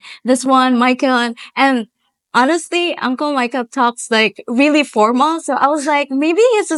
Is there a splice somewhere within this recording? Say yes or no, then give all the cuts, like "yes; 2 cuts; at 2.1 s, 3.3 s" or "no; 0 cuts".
no; 0 cuts